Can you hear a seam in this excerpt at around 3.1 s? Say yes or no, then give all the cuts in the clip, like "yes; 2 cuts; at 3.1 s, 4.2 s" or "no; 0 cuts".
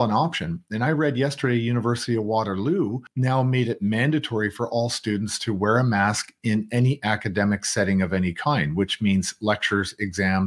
yes; 1 cut; at 3.1 s